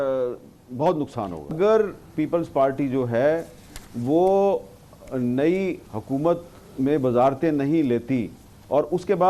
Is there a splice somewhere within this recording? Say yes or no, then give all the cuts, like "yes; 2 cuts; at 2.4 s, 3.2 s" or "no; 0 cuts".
yes; 1 cut; at 1.5 s